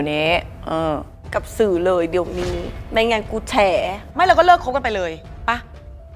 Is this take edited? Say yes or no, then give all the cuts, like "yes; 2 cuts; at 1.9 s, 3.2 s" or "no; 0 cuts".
no; 0 cuts